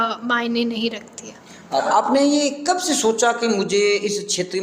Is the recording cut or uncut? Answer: cut